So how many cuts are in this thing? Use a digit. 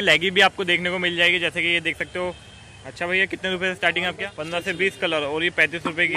1